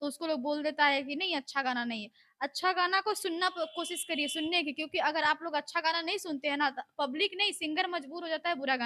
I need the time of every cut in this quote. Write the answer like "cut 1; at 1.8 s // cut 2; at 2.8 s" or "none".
none